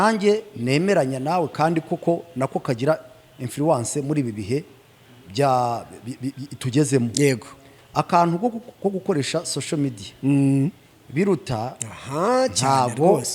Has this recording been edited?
no; 0 cuts

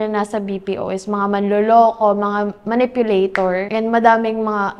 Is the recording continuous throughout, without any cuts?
no; 1 cut; at 3.7 s

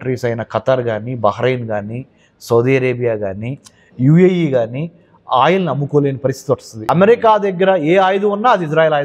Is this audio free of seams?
no; 1 cut; at 6.7 s

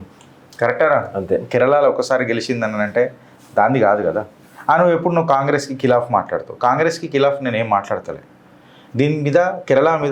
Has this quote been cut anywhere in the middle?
no; 0 cuts

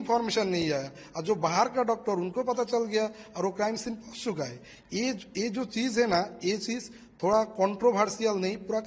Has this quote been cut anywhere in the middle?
no; 0 cuts

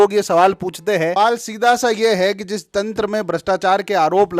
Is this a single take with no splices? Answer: no; 1 cut; at 1.1 s

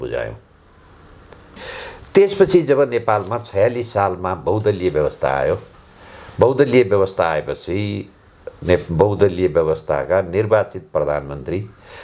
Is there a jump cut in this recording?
yes; 1 cut; at 1.5 s

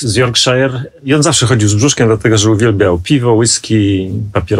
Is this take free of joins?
no; 1 cut; at 0.9 s

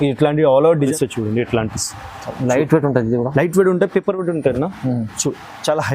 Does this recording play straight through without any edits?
no; 1 cut; at 0.9 s

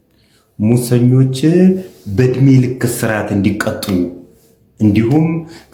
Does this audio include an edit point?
no; 0 cuts

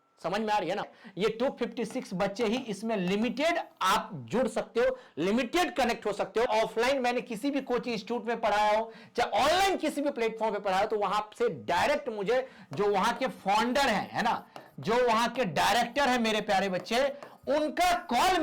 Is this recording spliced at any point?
yes; 2 cuts; at 1.0 s, 6.5 s

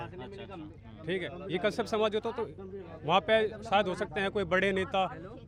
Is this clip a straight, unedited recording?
yes; 0 cuts

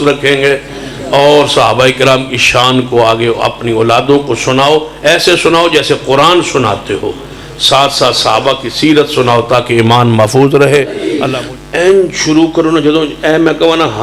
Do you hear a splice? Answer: yes; 1 cut; at 11.1 s

